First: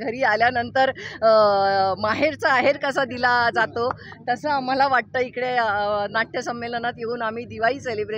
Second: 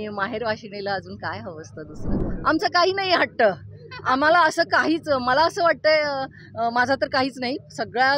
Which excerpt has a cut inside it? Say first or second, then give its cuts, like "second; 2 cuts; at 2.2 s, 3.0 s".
second; 1 cut; at 2.2 s